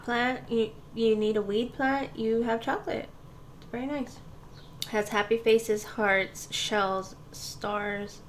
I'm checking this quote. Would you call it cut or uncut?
uncut